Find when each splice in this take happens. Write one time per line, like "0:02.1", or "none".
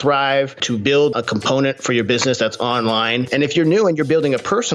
0:01.2
0:03.3